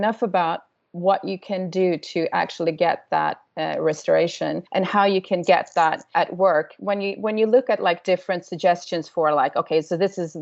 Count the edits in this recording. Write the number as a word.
two